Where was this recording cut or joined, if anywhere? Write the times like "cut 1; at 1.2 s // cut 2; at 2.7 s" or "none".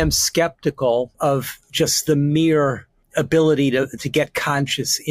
cut 1; at 1.1 s // cut 2; at 3.0 s